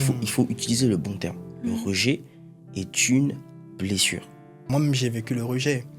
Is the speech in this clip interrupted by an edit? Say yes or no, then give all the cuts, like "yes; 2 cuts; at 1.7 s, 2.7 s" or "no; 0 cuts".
yes; 1 cut; at 4.7 s